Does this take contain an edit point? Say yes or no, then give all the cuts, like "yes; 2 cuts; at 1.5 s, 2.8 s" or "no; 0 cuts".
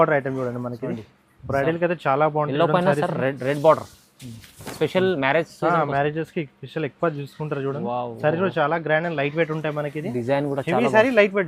no; 0 cuts